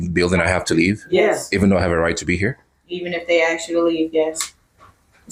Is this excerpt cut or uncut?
uncut